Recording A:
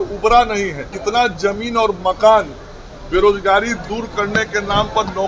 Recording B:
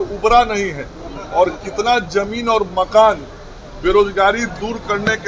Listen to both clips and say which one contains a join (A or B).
A